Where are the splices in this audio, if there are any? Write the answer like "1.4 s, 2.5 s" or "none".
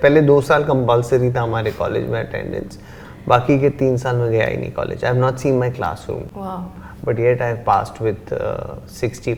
none